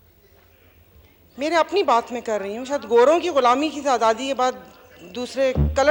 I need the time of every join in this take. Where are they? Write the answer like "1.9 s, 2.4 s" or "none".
none